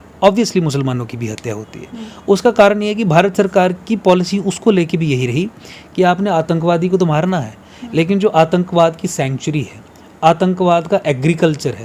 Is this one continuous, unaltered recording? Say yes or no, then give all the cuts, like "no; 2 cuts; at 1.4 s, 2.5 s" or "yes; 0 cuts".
yes; 0 cuts